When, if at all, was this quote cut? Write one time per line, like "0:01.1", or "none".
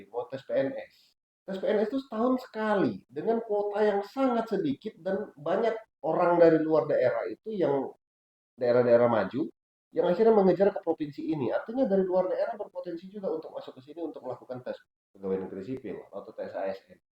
none